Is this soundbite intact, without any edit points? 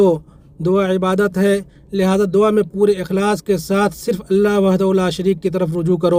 yes; 0 cuts

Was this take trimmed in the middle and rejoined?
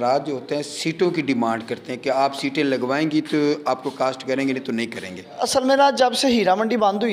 yes; 1 cut; at 5.4 s

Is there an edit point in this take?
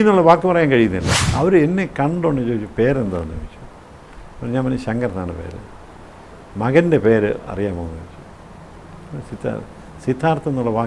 yes; 1 cut; at 1.2 s

